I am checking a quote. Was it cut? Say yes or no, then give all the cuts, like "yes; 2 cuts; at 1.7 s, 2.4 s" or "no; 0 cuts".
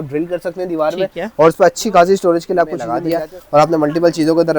yes; 1 cut; at 2.9 s